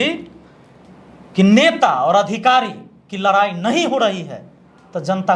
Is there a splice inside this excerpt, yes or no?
no